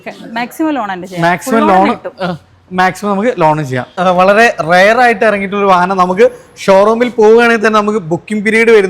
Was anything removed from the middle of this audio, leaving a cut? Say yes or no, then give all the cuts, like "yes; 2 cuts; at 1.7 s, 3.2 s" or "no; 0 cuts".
no; 0 cuts